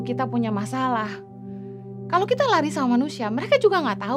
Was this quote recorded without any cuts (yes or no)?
yes